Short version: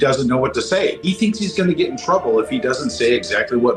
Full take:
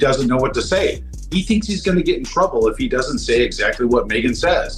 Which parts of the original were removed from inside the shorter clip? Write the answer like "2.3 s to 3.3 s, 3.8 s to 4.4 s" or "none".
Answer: 1.0 s to 1.3 s

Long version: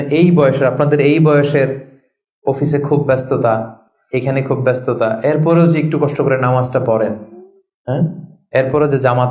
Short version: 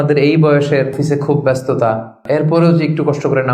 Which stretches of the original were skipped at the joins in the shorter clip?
1.8 s to 2.6 s, 3.9 s to 5.2 s

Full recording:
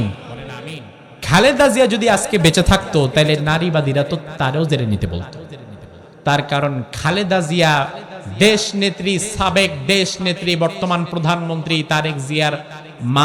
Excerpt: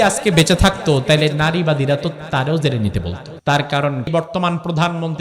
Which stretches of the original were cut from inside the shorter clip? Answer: 5.3 s to 6.0 s, 6.9 s to 10.6 s

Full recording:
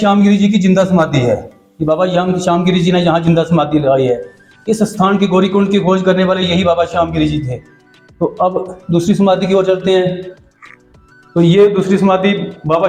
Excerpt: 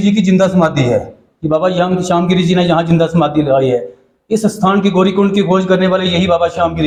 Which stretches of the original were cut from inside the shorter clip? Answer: none

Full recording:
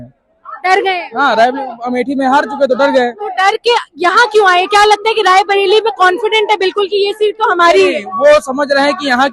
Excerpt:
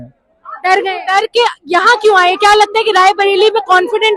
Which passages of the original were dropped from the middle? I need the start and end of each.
1.0 s to 3.3 s

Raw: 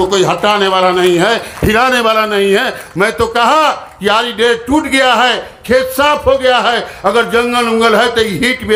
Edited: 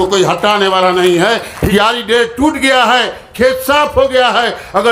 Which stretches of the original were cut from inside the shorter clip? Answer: 1.6 s to 3.9 s

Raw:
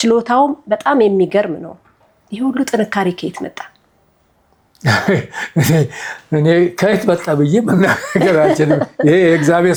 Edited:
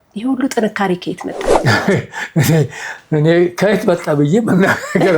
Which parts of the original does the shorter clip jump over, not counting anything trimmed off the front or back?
3.6 s to 4.7 s

